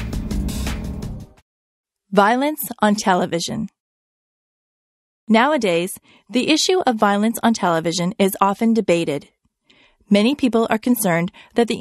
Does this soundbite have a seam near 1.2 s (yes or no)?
yes